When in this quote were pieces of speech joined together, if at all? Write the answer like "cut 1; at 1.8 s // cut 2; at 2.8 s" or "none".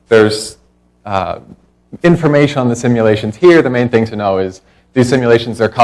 none